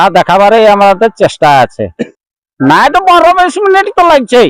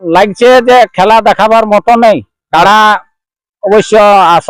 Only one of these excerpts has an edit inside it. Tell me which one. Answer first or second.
first